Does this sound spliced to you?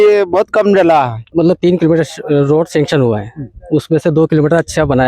yes; 1 cut; at 1.2 s

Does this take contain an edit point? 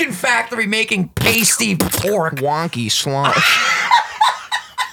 no; 0 cuts

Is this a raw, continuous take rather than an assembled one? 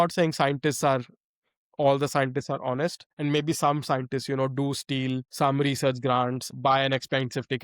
no; 3 cuts; at 3.1 s, 5.3 s, 6.4 s

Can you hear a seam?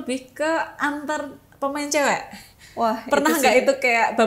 no; 0 cuts

